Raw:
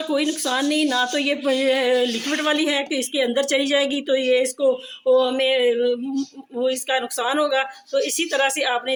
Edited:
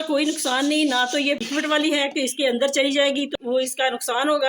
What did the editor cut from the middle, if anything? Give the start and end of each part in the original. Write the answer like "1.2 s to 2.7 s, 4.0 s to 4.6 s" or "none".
1.4 s to 2.1 s, 4.0 s to 6.4 s